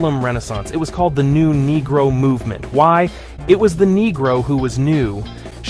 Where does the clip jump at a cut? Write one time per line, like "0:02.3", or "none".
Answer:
0:03.2